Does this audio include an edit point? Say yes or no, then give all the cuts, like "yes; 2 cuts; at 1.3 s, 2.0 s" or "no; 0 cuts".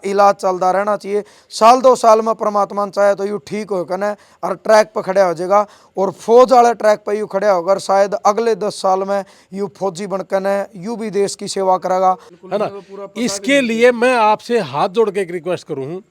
yes; 1 cut; at 12.3 s